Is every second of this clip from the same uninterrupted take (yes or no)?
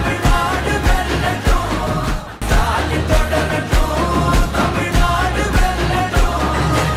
yes